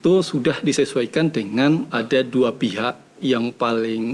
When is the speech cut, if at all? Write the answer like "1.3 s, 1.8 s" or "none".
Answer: 1.9 s